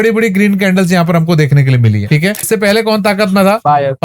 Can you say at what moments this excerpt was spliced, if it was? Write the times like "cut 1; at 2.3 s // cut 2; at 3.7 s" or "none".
cut 1; at 2.5 s